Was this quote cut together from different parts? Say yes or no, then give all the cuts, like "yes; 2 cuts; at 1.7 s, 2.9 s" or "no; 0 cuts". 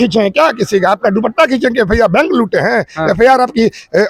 no; 0 cuts